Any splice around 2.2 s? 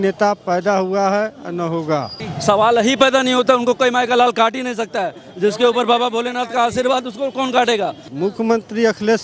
yes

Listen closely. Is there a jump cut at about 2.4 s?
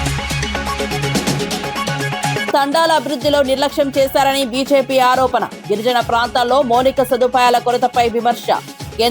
yes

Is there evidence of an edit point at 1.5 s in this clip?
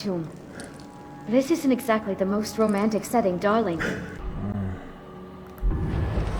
no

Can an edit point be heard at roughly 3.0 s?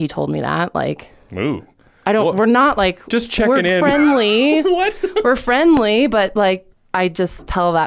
no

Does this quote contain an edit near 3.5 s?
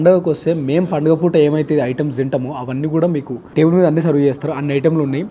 yes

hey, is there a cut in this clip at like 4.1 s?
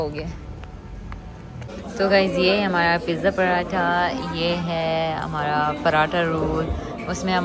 no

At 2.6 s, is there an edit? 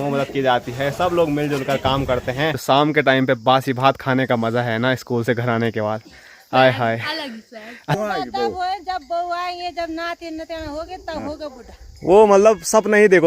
yes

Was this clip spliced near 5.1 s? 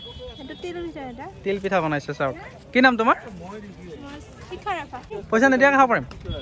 yes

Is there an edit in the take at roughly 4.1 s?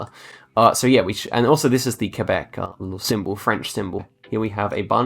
yes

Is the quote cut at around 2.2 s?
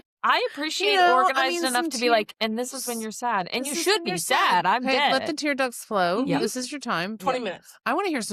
no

